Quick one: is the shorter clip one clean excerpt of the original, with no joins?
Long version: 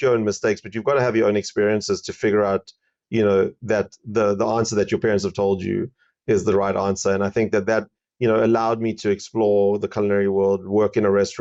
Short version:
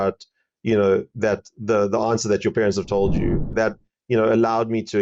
no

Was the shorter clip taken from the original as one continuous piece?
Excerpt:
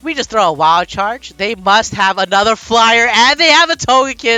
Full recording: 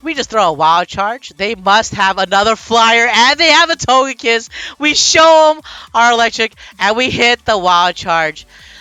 yes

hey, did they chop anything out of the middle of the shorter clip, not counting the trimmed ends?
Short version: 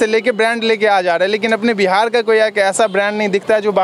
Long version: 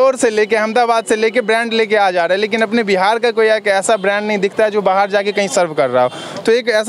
no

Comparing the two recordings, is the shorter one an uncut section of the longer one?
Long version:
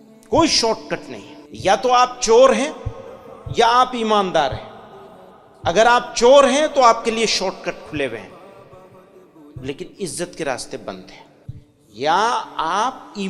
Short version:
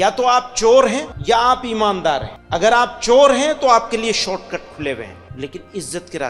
no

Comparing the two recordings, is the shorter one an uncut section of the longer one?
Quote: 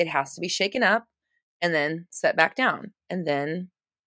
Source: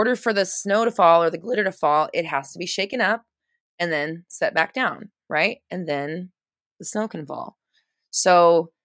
no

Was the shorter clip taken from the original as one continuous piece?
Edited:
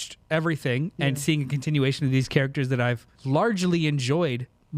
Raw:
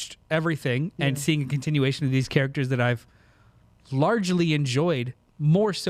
no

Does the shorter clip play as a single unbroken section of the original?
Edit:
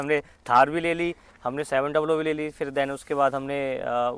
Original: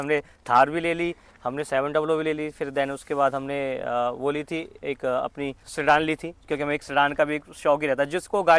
yes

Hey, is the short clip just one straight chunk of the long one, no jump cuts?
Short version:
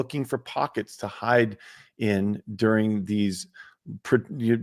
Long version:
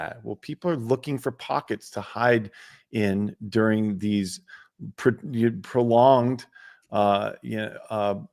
yes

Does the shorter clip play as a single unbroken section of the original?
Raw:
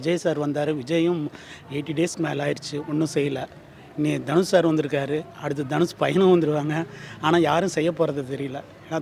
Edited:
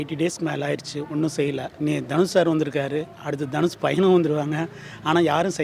no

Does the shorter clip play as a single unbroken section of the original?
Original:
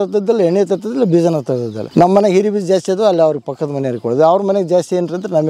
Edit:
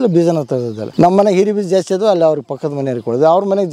yes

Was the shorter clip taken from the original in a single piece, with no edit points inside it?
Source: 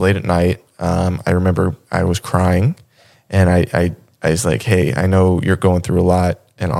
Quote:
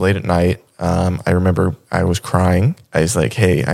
no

